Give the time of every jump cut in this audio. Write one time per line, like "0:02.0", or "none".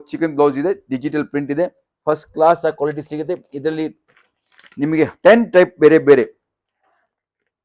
none